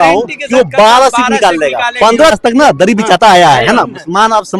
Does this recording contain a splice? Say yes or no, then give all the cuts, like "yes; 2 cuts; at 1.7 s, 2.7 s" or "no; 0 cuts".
yes; 1 cut; at 2.3 s